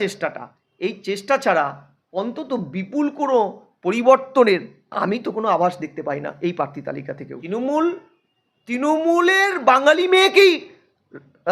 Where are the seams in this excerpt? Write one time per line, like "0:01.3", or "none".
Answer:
0:07.3